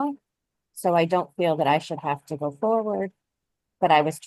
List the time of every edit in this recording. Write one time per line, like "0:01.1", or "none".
none